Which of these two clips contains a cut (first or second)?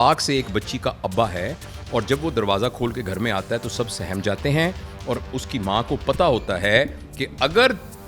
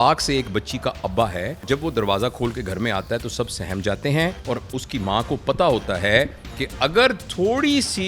second